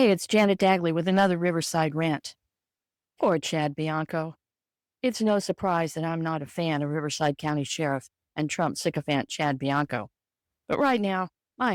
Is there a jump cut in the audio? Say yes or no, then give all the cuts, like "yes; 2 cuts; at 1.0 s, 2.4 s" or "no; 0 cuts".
no; 0 cuts